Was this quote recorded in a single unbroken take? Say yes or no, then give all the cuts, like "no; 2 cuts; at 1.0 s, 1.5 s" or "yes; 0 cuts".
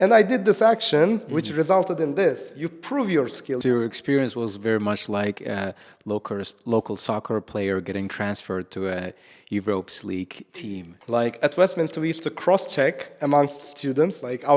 no; 2 cuts; at 3.6 s, 10.4 s